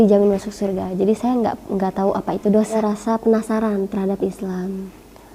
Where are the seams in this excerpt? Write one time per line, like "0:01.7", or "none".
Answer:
0:02.8